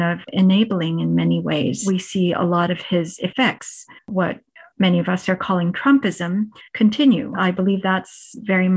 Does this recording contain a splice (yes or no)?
yes